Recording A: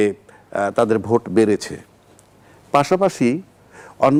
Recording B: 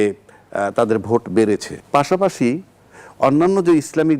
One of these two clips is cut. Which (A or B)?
B